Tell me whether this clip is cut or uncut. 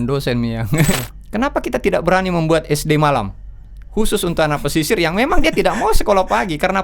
cut